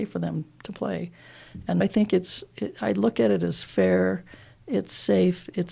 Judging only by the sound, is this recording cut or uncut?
cut